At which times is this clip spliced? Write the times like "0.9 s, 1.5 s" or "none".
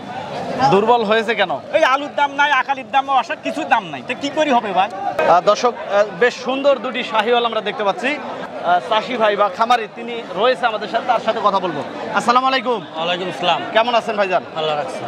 none